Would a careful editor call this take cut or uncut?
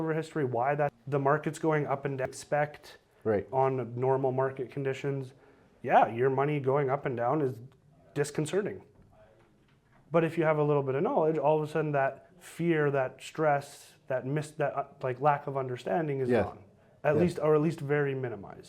cut